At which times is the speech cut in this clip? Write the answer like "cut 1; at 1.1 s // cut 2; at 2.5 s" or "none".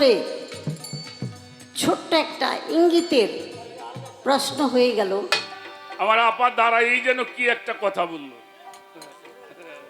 cut 1; at 5.4 s